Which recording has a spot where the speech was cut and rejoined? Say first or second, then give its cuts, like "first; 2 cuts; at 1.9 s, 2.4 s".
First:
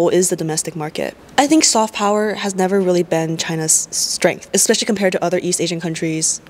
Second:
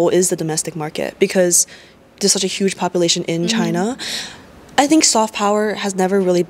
first; 1 cut; at 1.1 s